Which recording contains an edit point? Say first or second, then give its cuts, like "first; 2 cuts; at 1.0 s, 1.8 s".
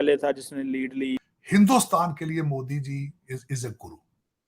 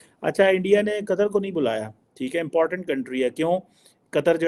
first; 1 cut; at 1.3 s